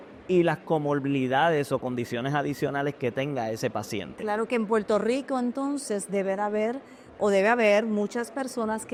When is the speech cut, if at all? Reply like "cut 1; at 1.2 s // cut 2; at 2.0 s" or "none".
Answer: none